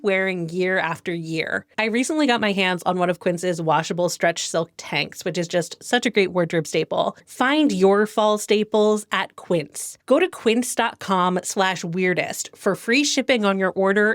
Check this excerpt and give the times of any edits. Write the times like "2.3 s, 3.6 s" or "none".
1.6 s, 7.2 s